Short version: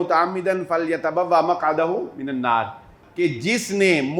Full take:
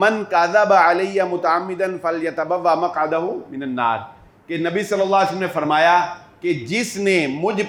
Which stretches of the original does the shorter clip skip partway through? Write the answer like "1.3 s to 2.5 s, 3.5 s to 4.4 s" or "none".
4.3 s to 6.2 s